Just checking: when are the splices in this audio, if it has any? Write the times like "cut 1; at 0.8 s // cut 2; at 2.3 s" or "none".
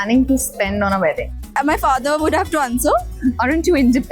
cut 1; at 1.5 s